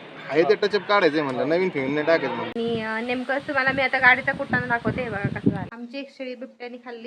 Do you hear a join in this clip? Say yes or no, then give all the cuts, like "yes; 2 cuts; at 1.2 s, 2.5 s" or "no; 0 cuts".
yes; 2 cuts; at 2.5 s, 5.7 s